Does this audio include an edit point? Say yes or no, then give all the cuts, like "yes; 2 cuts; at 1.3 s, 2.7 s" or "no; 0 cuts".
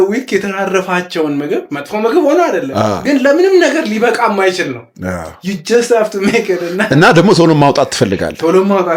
no; 0 cuts